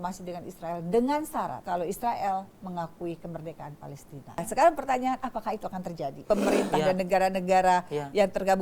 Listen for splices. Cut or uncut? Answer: cut